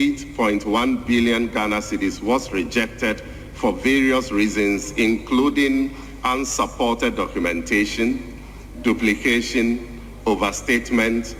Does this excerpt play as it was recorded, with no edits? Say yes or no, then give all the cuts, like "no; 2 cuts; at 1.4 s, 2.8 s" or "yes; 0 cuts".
yes; 0 cuts